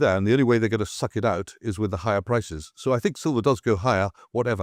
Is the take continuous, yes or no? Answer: yes